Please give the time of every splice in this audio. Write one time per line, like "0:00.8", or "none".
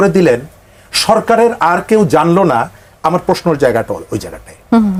none